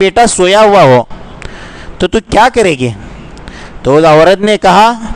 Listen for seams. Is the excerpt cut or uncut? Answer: uncut